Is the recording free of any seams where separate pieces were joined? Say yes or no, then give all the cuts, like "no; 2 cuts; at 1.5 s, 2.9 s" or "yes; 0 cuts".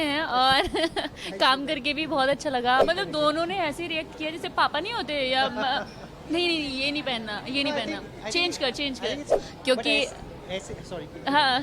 no; 2 cuts; at 2.8 s, 9.3 s